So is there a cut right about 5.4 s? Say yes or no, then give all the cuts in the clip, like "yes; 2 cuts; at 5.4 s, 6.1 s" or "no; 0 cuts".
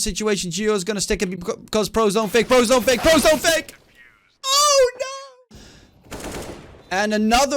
yes; 1 cut; at 5.4 s